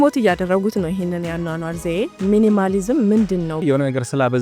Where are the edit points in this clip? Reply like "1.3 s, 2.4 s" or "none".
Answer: 2.1 s, 3.6 s